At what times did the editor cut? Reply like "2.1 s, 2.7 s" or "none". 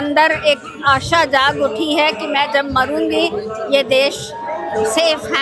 none

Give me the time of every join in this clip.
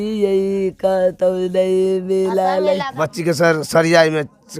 2.9 s

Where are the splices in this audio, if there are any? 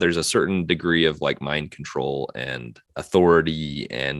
2.7 s

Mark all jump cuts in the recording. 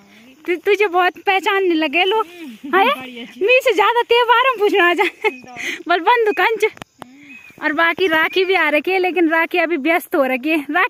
none

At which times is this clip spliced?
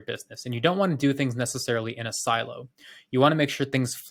none

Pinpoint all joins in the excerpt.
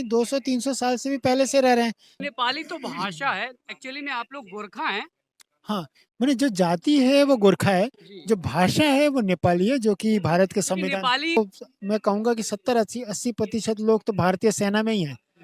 2.3 s, 11.4 s

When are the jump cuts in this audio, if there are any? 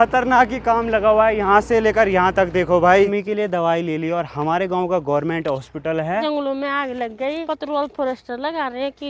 3.1 s, 6.2 s, 7.4 s

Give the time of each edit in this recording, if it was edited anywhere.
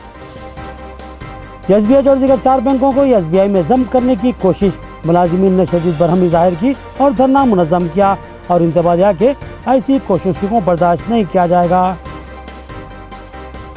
1.0 s

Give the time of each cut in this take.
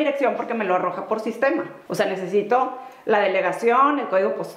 1.8 s

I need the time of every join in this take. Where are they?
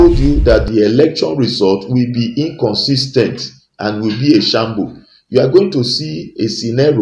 none

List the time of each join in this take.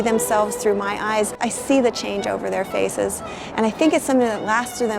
1.4 s

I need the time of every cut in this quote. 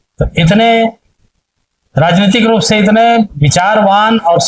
none

